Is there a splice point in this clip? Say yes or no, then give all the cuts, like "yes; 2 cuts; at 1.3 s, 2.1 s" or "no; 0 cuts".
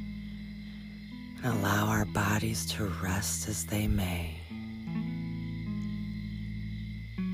yes; 1 cut; at 1.3 s